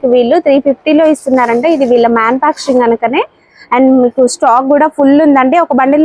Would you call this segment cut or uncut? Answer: uncut